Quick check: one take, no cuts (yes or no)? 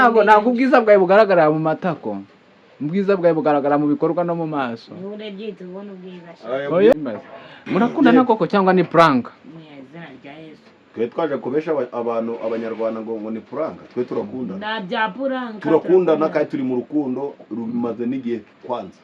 no